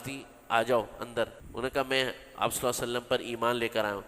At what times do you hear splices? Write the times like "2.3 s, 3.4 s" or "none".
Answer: 1.4 s